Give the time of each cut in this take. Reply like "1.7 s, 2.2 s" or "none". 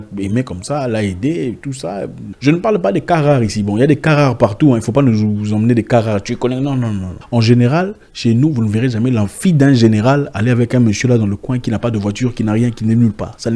2.2 s, 7.1 s